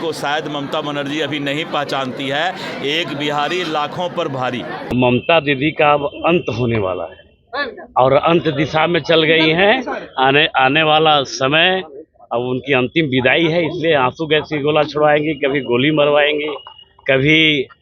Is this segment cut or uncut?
cut